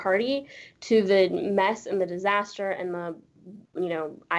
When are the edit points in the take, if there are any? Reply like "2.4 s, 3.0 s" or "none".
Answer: none